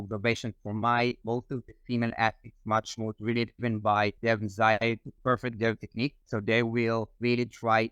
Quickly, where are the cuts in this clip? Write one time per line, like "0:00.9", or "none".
0:05.1